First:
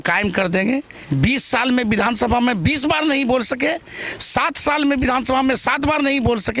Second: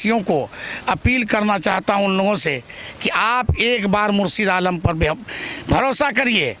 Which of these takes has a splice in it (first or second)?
first